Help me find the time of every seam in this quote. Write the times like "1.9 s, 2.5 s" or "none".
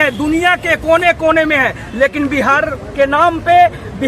none

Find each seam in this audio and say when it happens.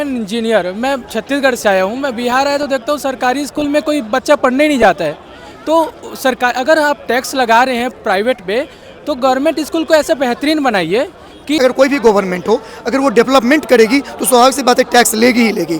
11.6 s

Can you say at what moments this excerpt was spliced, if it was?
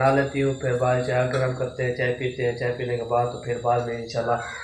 none

